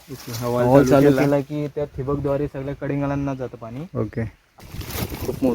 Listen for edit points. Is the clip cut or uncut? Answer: cut